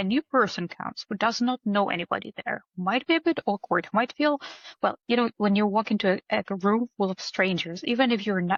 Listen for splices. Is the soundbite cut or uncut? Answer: uncut